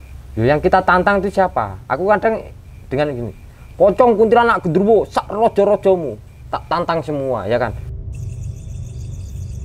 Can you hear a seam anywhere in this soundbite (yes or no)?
no